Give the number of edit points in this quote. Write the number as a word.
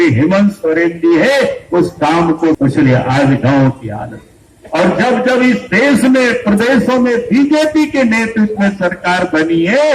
one